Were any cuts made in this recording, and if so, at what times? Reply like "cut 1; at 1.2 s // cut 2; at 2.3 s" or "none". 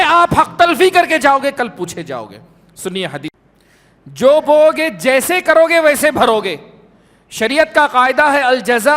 cut 1; at 3.3 s